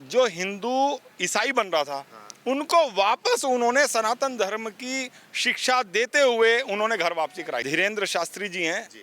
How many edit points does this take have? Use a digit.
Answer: 1